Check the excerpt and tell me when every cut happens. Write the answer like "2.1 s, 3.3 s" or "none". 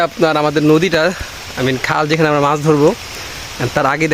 none